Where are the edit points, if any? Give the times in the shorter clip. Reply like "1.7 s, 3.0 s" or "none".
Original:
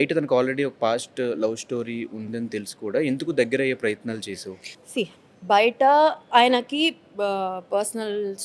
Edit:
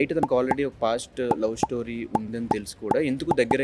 none